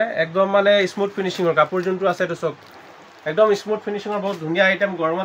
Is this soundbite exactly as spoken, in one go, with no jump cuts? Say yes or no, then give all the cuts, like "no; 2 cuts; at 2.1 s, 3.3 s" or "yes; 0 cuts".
yes; 0 cuts